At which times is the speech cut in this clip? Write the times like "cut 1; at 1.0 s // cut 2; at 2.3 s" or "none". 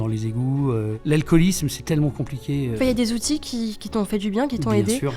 cut 1; at 1.0 s // cut 2; at 2.7 s